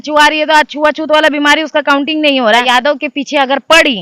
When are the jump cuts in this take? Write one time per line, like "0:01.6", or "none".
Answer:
0:02.6